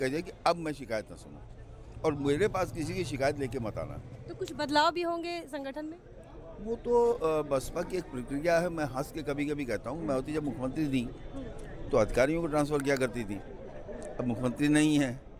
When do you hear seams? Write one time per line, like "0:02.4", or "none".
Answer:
none